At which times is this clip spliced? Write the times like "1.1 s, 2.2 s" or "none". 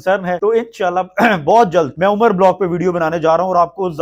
none